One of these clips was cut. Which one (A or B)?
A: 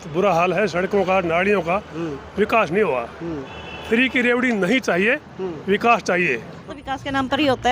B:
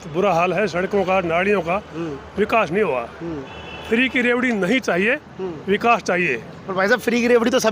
A